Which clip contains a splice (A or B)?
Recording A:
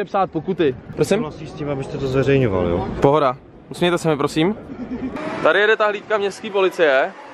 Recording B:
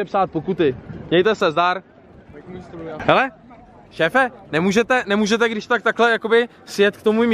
A